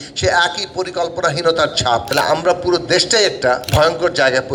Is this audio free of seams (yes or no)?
no